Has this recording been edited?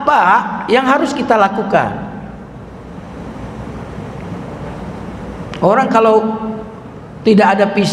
no; 0 cuts

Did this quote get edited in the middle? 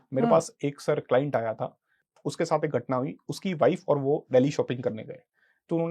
yes; 1 cut; at 2.0 s

